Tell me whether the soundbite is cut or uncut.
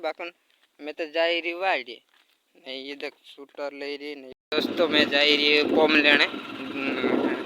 cut